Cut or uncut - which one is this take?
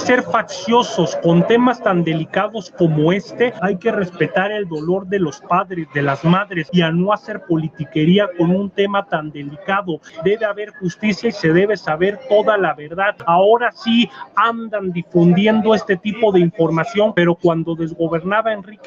cut